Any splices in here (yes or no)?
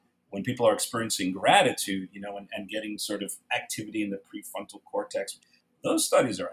yes